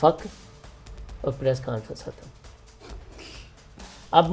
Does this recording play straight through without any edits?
yes; 0 cuts

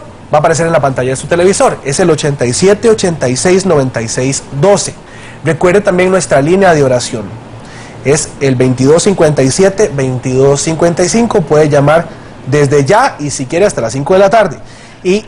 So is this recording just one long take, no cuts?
no; 1 cut; at 7.2 s

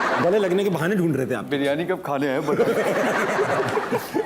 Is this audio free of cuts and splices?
yes; 0 cuts

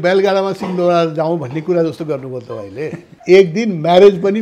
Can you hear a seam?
yes; 1 cut; at 3.1 s

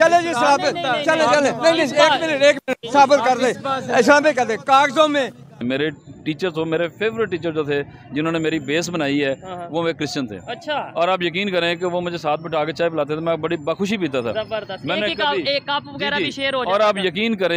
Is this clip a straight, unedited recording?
no; 1 cut; at 5.5 s

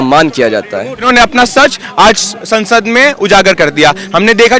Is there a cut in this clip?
yes; 1 cut; at 1.0 s

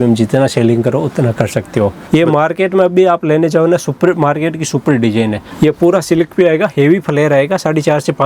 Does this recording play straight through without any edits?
no; 2 cuts; at 2.0 s, 5.5 s

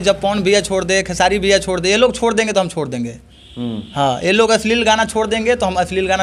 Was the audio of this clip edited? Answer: no; 0 cuts

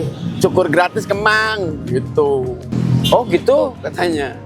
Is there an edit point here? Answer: yes; 1 cut; at 2.7 s

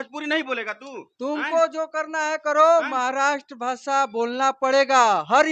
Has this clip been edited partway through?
no; 0 cuts

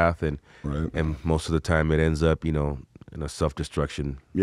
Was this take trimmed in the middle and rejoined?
no; 0 cuts

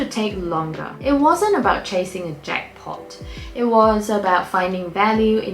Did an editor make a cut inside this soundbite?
yes; 1 cut; at 0.9 s

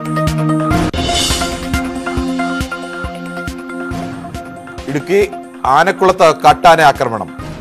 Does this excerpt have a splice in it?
yes; 2 cuts; at 0.9 s, 3.0 s

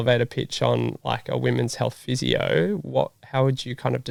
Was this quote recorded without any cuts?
yes; 0 cuts

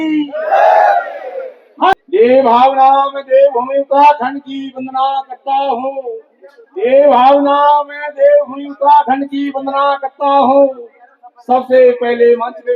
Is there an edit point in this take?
yes; 1 cut; at 1.9 s

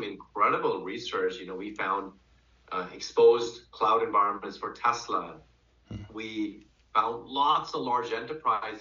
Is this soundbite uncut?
yes; 0 cuts

